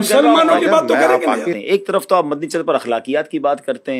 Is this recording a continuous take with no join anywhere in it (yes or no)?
no